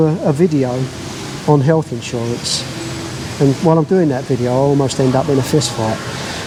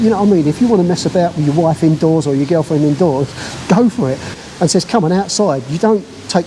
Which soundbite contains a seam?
second; 1 cut; at 4.3 s

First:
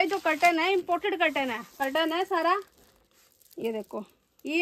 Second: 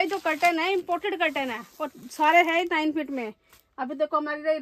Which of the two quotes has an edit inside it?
first; 1 cut; at 1.7 s

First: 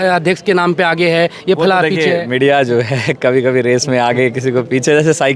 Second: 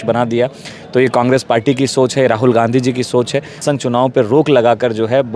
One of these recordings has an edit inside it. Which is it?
second; 1 cut; at 3.6 s

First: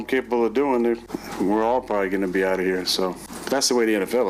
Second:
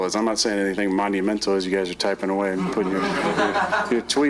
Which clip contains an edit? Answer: first; 2 cuts; at 1.2 s, 3.3 s

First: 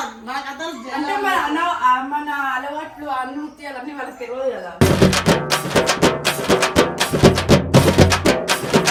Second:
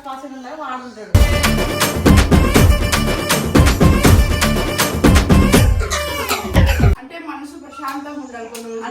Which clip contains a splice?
second; 1 cut; at 7.1 s

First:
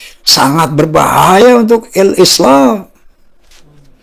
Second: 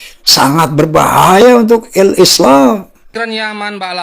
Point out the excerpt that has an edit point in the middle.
second; 1 cut; at 3.1 s

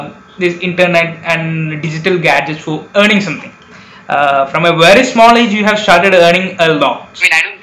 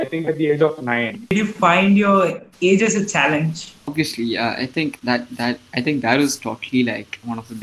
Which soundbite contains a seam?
second; 2 cuts; at 1.3 s, 3.7 s

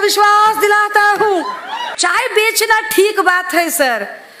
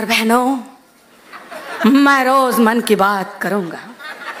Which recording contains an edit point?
first; 1 cut; at 1.9 s

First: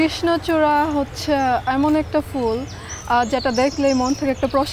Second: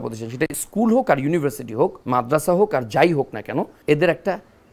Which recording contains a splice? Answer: second; 2 cuts; at 2.0 s, 3.7 s

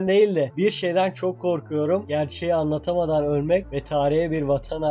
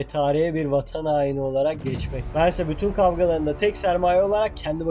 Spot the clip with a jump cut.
second; 1 cut; at 2.2 s

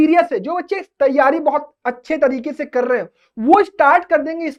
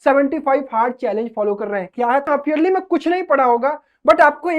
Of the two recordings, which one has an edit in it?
second; 1 cut; at 2.3 s

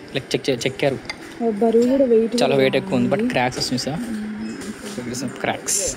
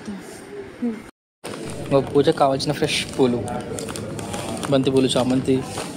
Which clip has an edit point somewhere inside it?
second; 1 cut; at 1.1 s

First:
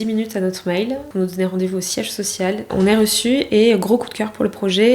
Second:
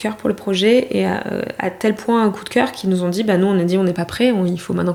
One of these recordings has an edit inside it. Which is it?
first; 2 cuts; at 1.1 s, 2.7 s

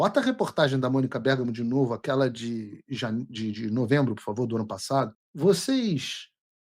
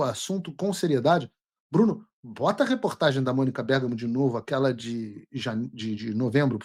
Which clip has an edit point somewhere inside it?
first; 1 cut; at 5.2 s

